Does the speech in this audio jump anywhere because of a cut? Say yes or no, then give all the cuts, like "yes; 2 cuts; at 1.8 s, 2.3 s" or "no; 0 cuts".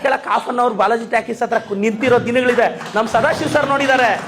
no; 0 cuts